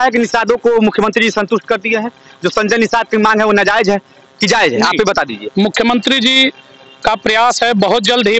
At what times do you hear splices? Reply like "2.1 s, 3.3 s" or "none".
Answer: none